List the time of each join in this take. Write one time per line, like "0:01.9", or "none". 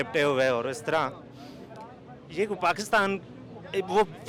none